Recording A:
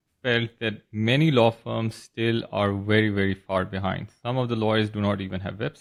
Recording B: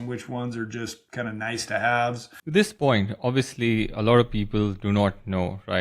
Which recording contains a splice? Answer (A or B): B